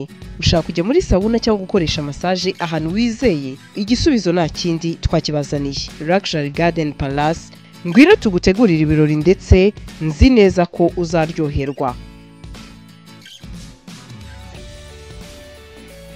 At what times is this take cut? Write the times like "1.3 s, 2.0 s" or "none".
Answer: none